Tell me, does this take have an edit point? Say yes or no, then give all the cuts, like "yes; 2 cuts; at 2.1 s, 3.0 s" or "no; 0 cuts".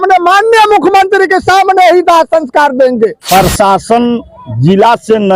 yes; 1 cut; at 3.2 s